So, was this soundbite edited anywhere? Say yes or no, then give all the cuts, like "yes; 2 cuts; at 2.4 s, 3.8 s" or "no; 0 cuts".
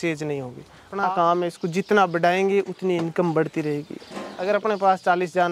yes; 2 cuts; at 0.9 s, 4.4 s